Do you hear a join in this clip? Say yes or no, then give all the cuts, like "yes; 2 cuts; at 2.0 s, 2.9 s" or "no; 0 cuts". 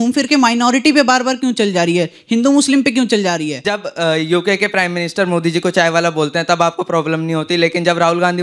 yes; 1 cut; at 3.9 s